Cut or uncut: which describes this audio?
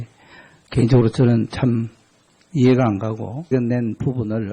uncut